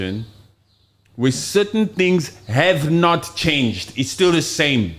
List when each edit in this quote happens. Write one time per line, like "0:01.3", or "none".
none

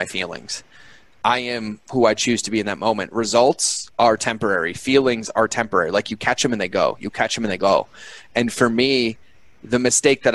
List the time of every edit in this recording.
none

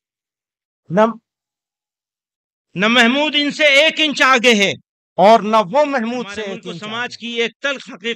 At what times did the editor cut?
0:06.6

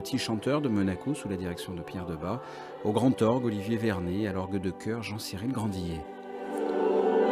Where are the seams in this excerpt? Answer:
none

